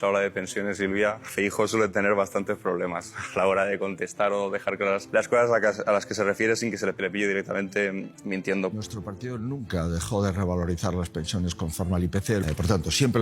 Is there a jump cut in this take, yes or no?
yes